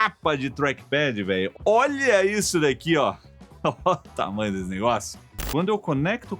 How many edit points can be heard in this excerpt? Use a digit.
1